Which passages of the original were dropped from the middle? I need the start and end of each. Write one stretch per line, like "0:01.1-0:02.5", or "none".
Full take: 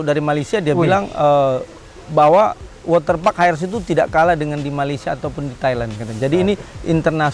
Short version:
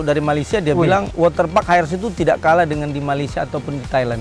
0:01.1-0:02.8